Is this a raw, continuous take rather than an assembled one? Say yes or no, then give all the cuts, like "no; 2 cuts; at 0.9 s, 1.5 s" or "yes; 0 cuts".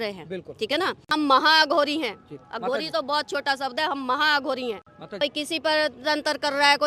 no; 2 cuts; at 1.1 s, 5.2 s